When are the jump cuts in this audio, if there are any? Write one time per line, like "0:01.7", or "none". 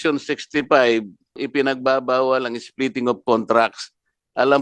0:01.4